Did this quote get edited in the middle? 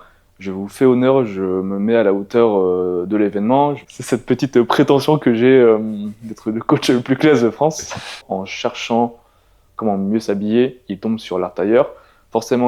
yes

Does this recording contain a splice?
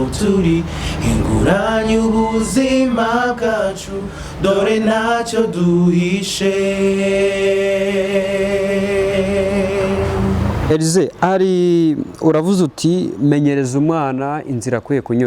yes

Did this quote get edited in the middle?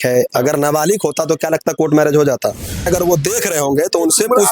yes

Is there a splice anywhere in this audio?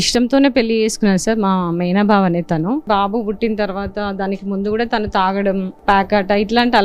yes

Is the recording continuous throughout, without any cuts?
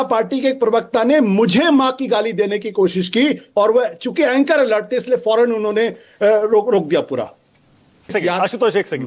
no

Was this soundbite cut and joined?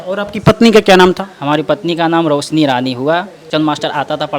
yes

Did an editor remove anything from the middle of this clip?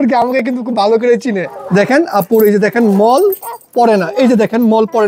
yes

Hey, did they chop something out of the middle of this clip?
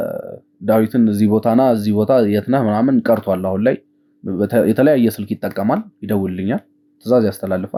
no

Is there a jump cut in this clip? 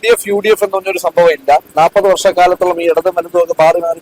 yes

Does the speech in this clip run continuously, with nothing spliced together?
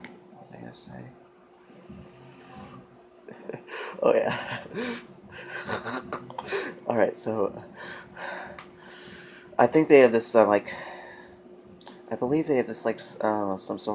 no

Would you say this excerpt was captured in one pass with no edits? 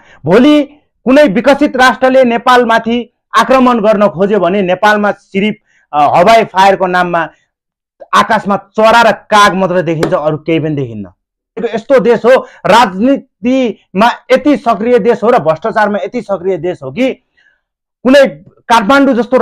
no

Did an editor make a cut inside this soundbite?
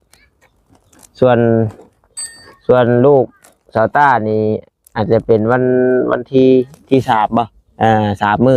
no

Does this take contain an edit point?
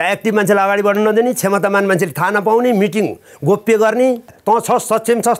yes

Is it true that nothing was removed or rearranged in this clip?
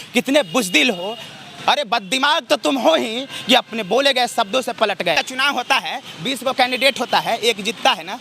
no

